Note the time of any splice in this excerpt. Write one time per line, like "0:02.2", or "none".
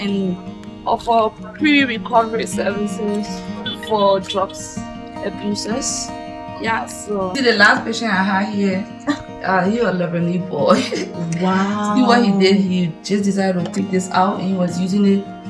0:07.3

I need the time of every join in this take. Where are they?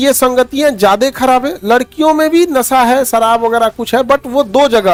none

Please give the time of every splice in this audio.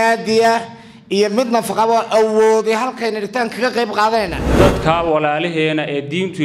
0:04.4

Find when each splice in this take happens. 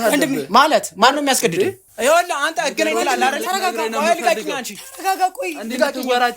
0:01.9

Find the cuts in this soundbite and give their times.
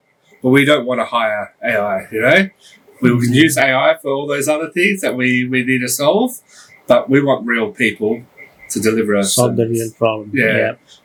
none

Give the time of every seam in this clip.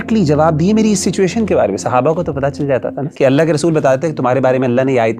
0:03.0

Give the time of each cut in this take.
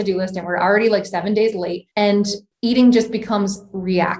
0:02.3

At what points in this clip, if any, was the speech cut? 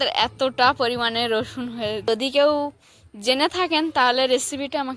0:02.1

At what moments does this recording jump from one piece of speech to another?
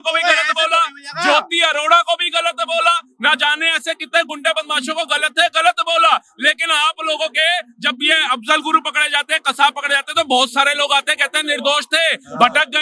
none

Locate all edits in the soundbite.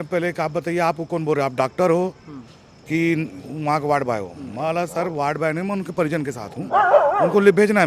none

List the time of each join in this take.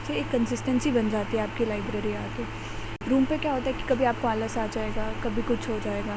none

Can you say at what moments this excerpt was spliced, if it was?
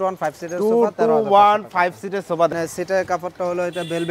0:02.5

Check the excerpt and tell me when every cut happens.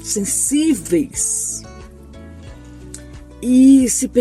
0:01.3
0:03.4

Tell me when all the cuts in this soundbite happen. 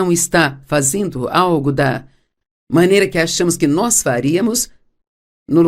0:04.2

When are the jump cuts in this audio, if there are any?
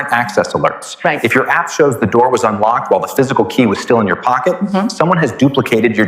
none

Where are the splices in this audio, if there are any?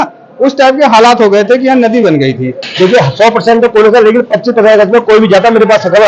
0:02.6

